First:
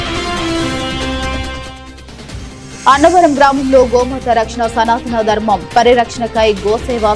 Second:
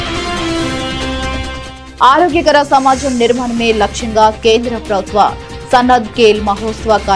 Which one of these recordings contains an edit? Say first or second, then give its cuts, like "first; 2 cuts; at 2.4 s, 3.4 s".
second; 1 cut; at 1.8 s